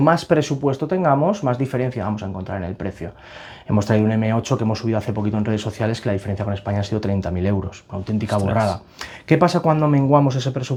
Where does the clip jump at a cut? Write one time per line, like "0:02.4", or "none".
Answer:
none